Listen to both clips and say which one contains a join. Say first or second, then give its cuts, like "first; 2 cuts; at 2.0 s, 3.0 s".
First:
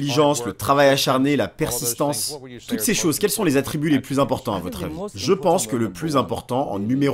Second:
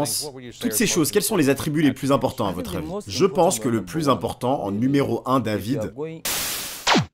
second; 1 cut; at 6.1 s